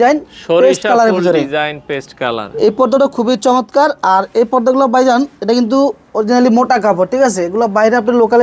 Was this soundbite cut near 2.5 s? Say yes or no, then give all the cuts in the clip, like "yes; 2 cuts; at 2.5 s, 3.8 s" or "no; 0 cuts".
no; 0 cuts